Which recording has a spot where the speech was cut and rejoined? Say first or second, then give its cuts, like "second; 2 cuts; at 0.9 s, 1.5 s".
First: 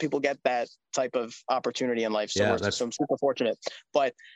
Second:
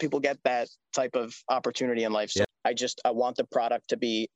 second; 1 cut; at 2.4 s